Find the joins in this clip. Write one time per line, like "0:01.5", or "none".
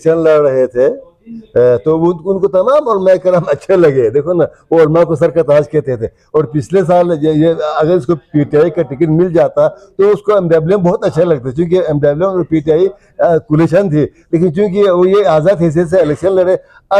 none